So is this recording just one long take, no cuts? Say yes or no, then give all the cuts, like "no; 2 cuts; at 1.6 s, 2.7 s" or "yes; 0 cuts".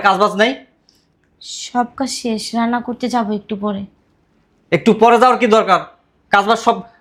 yes; 0 cuts